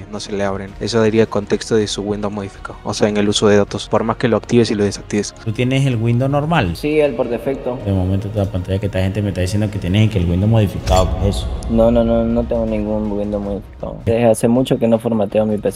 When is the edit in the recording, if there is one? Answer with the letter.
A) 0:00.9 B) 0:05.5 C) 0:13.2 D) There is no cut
B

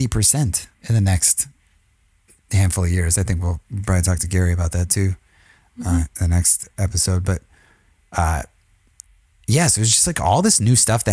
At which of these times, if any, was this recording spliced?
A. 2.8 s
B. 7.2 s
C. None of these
C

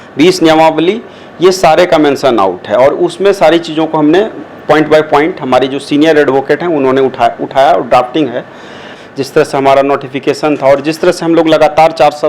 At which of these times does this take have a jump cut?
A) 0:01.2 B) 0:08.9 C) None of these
B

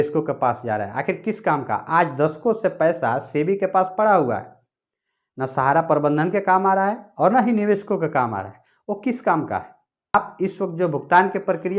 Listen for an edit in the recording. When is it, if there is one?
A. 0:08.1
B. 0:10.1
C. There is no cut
B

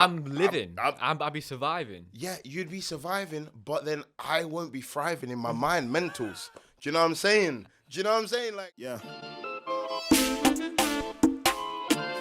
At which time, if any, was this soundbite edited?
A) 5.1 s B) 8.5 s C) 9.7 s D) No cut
B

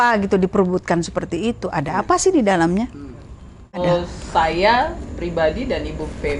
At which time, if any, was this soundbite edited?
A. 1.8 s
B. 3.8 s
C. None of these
B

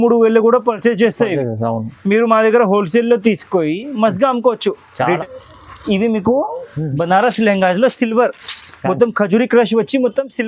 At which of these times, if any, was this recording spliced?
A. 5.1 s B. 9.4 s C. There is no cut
A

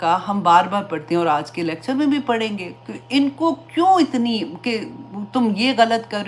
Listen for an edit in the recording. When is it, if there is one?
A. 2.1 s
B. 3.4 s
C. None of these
C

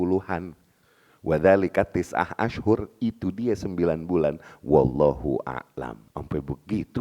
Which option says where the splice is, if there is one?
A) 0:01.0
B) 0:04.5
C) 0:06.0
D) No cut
C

